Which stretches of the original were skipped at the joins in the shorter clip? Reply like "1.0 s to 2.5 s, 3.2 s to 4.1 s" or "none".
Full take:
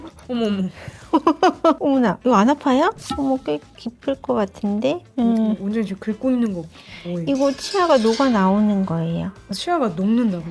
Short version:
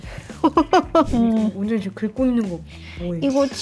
1.8 s to 5.1 s